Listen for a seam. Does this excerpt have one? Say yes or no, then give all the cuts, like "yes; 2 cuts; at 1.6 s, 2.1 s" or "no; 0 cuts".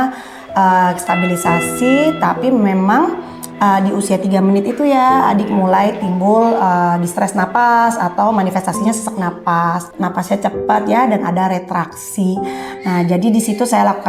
yes; 1 cut; at 9.9 s